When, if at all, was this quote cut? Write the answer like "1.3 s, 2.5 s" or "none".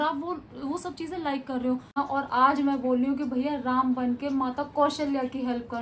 2.0 s